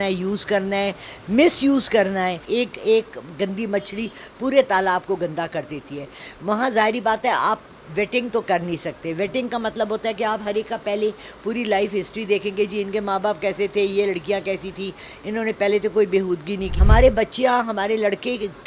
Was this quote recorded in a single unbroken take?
no; 2 cuts; at 2.4 s, 16.7 s

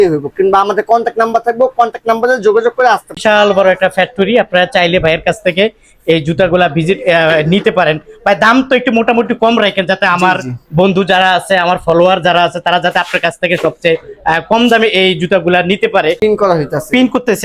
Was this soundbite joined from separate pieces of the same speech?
yes; 2 cuts; at 3.1 s, 16.2 s

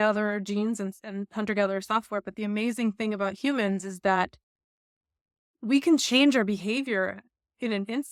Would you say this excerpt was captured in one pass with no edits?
yes; 0 cuts

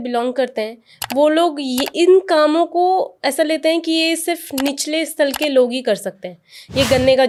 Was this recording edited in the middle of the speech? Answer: no; 0 cuts

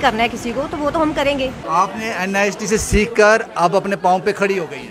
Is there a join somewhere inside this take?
yes; 1 cut; at 1.6 s

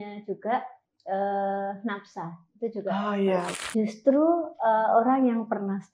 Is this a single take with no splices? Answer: no; 1 cut; at 3.6 s

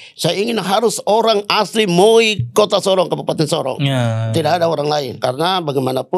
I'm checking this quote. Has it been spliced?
yes; 1 cut; at 5.1 s

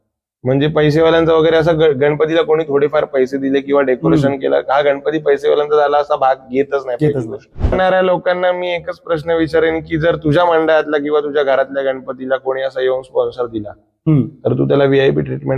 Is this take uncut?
no; 1 cut; at 7.7 s

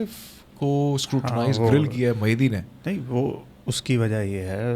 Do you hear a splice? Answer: no; 0 cuts

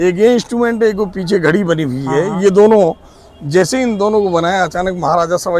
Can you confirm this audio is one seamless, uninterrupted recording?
yes; 0 cuts

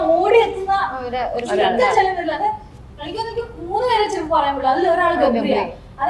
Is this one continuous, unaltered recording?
yes; 0 cuts

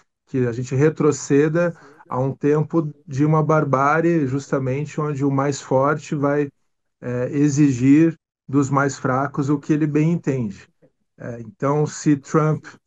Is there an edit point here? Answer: no; 0 cuts

